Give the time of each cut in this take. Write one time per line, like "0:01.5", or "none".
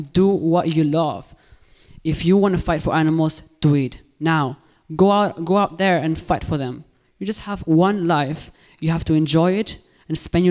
none